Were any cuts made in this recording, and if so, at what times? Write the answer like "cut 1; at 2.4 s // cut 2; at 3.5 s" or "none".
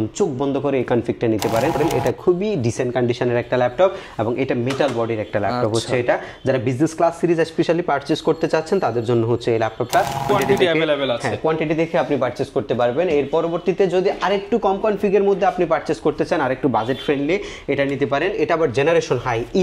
cut 1; at 1.8 s // cut 2; at 10.3 s